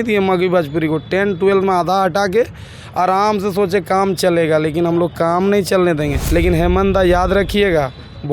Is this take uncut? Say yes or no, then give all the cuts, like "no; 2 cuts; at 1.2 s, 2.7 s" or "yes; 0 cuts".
no; 1 cut; at 6.2 s